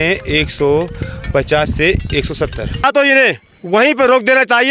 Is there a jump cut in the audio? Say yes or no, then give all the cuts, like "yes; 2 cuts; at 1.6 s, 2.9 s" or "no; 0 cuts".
yes; 1 cut; at 2.8 s